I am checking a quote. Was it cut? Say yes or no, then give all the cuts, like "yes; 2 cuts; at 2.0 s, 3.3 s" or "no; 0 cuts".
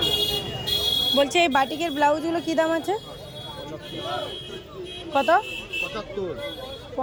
no; 0 cuts